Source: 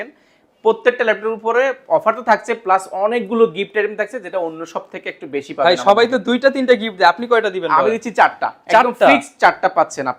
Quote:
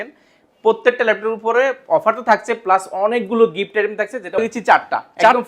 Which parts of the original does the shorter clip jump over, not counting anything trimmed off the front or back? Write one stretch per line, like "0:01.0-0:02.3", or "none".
0:04.4-0:07.9